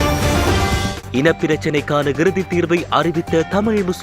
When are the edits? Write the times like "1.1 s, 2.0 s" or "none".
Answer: 0.9 s